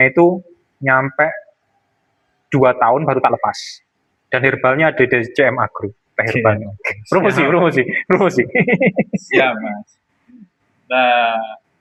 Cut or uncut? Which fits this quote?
uncut